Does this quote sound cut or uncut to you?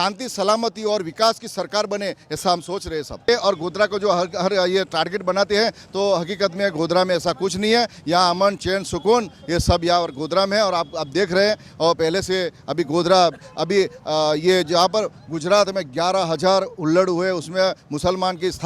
cut